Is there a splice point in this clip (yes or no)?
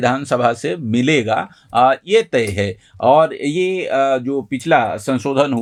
no